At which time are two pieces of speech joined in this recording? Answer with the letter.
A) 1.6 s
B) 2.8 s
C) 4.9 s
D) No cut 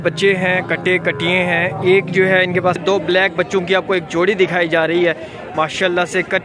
B